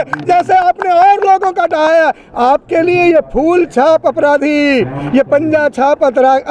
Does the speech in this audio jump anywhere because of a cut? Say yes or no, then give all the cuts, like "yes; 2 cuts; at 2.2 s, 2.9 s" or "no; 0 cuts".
no; 0 cuts